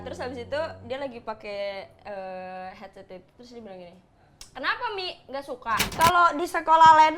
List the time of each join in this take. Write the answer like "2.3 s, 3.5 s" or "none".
5.9 s